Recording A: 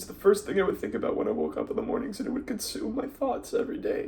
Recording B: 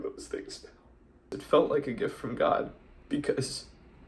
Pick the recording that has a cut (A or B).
B